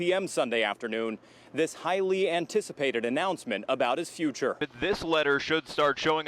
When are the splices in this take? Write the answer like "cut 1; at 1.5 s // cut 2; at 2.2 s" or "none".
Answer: cut 1; at 4.6 s